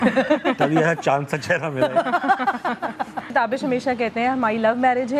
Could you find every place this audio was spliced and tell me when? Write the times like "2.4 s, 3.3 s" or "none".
3.3 s